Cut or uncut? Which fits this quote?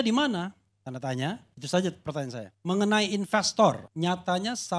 cut